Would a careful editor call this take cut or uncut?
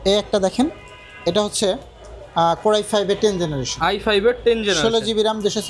uncut